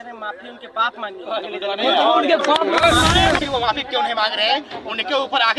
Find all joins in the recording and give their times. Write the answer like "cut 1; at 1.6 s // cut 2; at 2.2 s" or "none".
cut 1; at 3.4 s